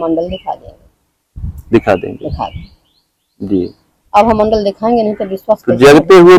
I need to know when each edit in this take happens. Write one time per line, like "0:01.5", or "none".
none